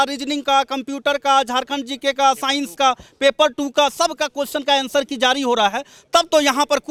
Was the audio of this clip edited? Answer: no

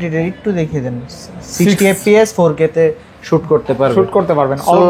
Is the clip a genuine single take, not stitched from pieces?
yes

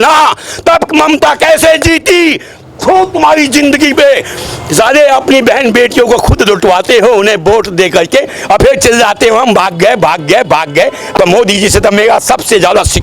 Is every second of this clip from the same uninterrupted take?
no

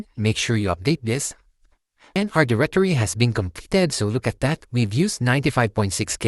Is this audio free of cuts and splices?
no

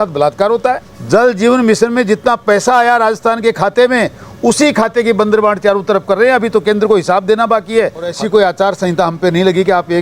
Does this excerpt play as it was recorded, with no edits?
no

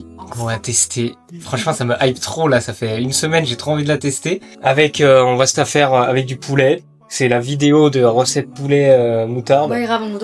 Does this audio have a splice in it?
no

